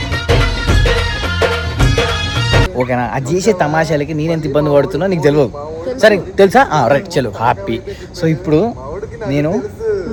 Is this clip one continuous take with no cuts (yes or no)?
yes